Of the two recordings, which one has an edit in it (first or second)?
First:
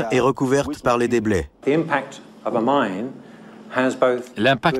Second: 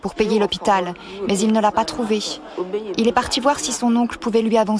first